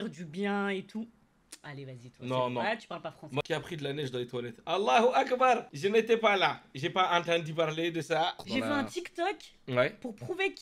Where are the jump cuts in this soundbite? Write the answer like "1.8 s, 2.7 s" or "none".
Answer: 3.4 s, 8.4 s